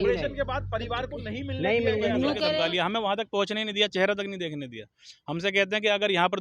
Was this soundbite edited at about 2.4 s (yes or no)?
yes